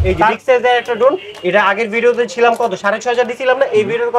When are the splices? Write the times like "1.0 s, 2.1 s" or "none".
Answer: none